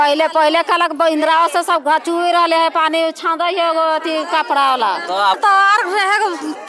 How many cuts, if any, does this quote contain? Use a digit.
1